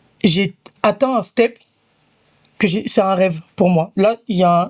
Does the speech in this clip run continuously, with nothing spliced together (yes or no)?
yes